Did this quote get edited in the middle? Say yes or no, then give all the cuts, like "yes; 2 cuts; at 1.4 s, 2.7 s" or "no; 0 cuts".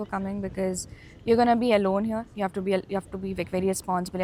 no; 0 cuts